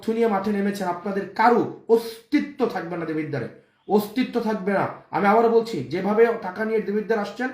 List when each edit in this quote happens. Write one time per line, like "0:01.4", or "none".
none